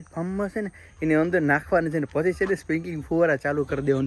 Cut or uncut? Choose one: uncut